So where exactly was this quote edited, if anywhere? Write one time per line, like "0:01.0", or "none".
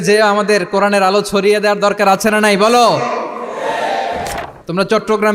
0:04.3